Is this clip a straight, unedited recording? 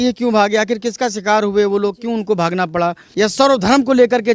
no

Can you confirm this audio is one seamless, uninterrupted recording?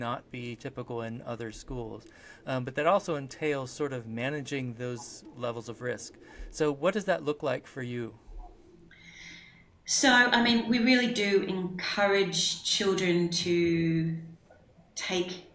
yes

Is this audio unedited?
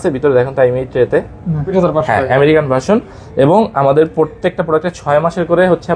no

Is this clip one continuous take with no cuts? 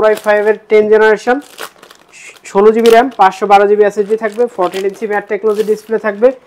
yes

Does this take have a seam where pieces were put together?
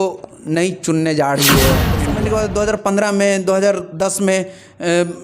yes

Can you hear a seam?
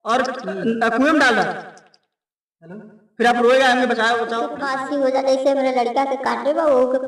yes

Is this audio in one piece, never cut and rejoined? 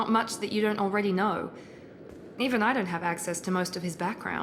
yes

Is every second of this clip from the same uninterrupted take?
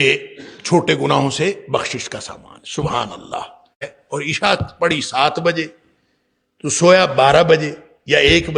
no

